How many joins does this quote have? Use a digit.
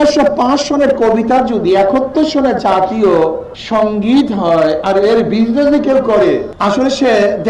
2